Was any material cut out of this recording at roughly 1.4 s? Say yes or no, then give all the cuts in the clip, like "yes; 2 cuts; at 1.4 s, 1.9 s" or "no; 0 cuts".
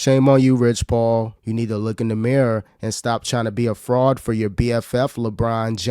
yes; 1 cut; at 1.4 s